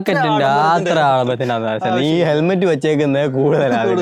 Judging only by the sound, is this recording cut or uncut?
uncut